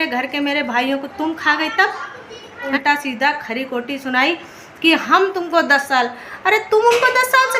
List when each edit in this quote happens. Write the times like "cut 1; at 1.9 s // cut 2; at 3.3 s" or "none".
cut 1; at 2.7 s